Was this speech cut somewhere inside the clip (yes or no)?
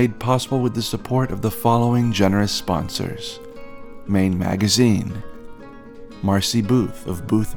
no